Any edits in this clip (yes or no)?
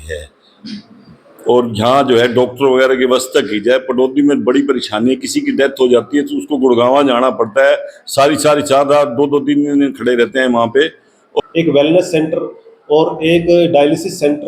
yes